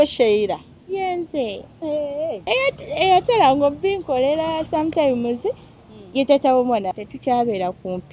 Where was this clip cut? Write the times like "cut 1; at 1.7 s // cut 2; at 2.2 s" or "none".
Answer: cut 1; at 2.4 s // cut 2; at 6.9 s